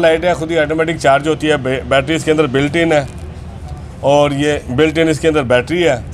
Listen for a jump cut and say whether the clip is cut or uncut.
uncut